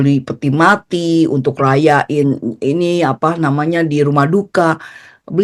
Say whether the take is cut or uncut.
uncut